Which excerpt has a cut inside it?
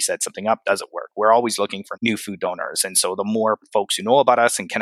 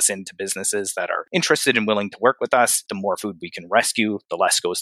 second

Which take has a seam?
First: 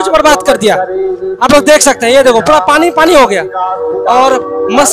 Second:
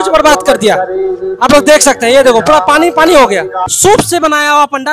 second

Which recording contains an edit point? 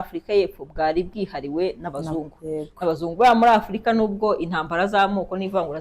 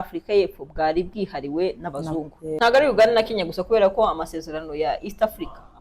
second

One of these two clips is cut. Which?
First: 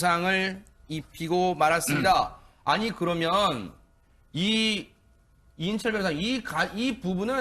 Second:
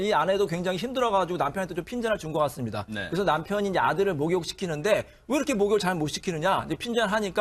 first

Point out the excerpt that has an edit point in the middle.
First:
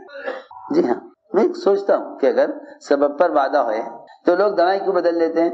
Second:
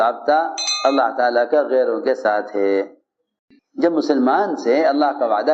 second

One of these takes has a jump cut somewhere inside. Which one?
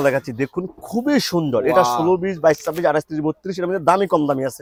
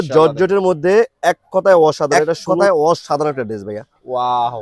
second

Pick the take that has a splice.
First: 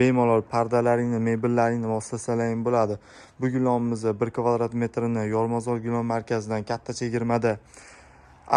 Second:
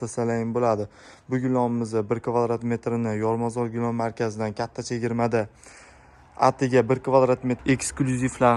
second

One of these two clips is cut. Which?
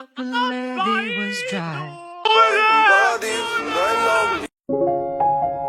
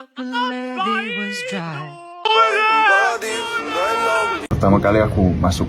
second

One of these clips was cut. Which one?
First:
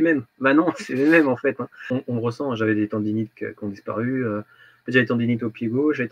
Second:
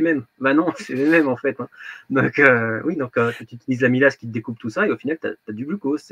first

